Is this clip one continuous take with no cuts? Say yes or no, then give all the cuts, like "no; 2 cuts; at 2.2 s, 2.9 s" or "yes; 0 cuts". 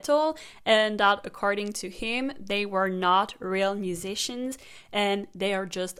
yes; 0 cuts